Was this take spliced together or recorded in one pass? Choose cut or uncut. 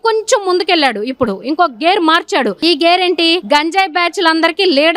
uncut